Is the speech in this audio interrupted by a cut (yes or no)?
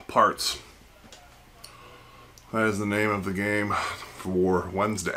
no